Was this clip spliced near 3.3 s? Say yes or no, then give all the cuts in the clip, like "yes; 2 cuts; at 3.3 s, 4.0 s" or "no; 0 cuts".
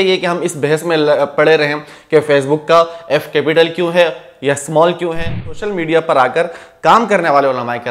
no; 1 cut; at 5.5 s